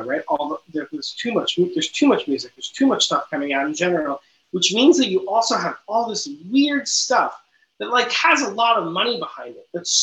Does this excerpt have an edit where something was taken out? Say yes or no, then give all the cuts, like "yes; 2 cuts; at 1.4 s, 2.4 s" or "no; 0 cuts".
no; 0 cuts